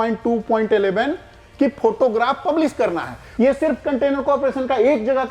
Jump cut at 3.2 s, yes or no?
yes